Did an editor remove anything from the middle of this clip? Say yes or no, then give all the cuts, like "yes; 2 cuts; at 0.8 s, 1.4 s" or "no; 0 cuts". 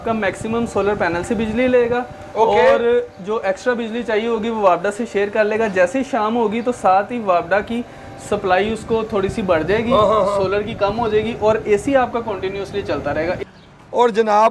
no; 0 cuts